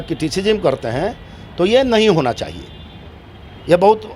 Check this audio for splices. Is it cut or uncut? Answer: uncut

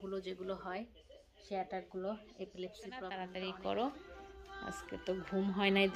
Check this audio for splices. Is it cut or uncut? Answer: cut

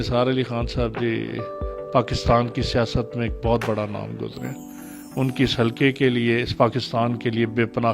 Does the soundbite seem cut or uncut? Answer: uncut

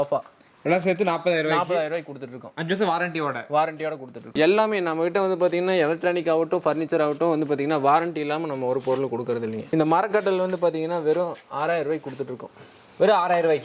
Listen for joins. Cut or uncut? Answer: cut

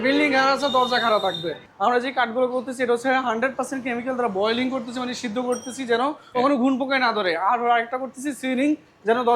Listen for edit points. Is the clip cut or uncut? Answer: cut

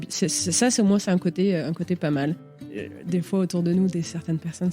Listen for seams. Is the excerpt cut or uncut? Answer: cut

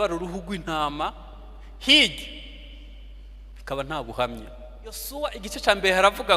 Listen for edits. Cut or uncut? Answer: cut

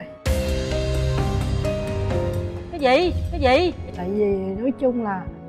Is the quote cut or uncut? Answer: cut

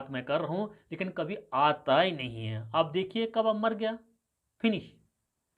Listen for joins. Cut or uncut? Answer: uncut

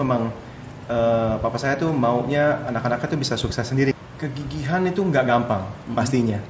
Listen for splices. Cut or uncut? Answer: cut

